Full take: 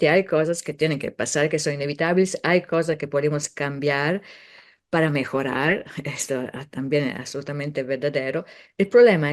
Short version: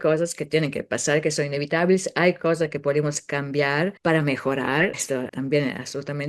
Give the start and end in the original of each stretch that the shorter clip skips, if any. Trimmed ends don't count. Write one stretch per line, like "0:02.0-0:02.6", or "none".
0:04.2-0:04.8
0:06.1-0:06.6